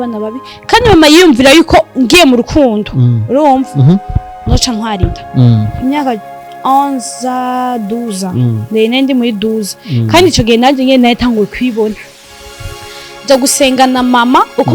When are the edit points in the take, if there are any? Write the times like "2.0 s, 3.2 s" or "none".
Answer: 5.7 s